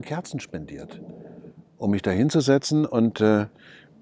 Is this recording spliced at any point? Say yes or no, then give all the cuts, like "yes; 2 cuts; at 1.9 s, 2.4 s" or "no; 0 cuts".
no; 0 cuts